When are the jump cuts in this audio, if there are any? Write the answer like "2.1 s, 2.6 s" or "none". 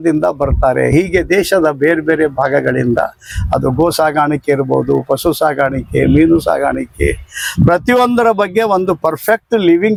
none